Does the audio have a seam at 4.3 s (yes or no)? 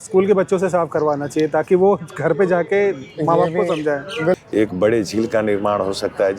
yes